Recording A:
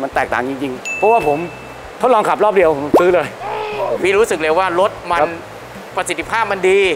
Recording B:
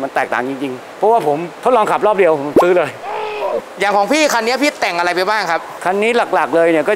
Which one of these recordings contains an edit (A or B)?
B